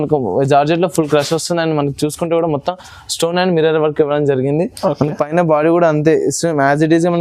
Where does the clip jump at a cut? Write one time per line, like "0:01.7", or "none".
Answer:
none